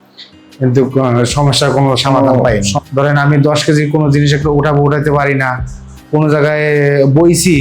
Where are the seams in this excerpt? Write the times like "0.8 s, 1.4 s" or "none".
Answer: 2.7 s